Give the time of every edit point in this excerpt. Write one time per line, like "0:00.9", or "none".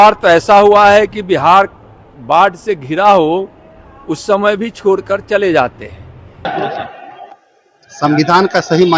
0:06.5